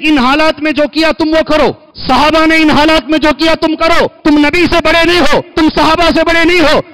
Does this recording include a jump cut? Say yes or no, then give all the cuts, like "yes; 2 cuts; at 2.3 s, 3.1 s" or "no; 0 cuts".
yes; 3 cuts; at 1.9 s, 4.1 s, 5.5 s